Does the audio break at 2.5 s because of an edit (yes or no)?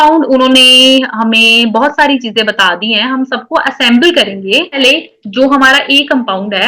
no